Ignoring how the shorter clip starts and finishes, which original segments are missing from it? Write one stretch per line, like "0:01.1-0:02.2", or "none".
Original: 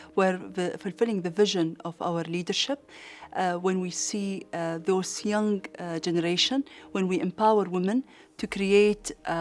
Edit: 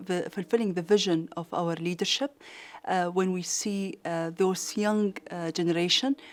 none